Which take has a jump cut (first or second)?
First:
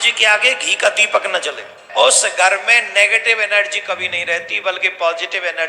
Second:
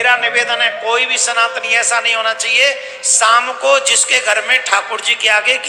first